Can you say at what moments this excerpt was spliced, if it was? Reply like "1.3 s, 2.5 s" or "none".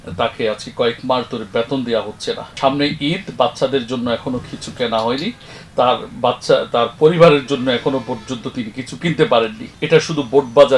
2.5 s, 9.7 s